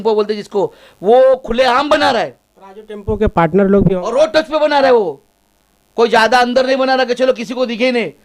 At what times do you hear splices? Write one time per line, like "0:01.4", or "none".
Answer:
none